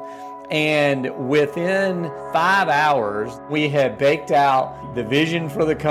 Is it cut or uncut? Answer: cut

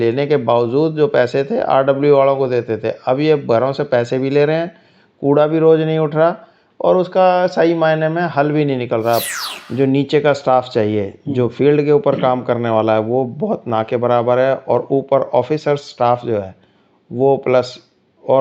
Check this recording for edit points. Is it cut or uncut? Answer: cut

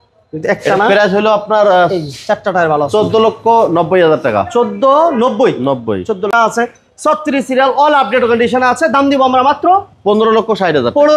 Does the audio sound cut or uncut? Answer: cut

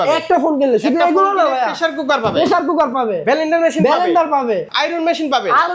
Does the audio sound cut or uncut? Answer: cut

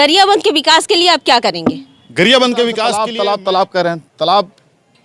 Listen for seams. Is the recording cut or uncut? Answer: cut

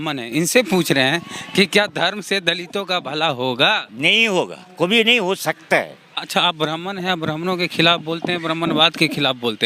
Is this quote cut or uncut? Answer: cut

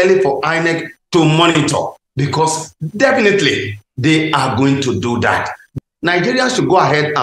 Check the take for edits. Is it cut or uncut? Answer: cut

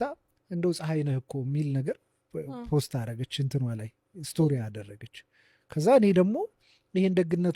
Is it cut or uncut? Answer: uncut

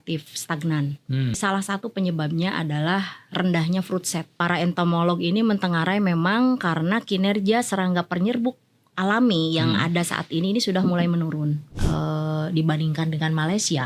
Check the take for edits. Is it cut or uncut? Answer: cut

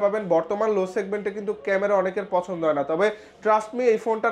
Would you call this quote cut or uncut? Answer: uncut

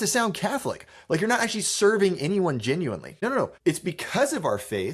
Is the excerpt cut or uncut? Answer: cut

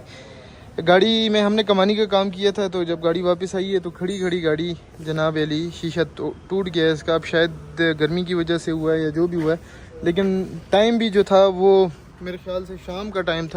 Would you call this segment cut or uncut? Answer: uncut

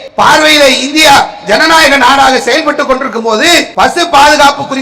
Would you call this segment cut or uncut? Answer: cut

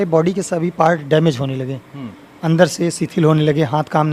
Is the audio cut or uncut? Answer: uncut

